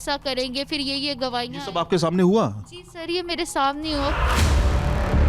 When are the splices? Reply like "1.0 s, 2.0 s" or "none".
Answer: 4.2 s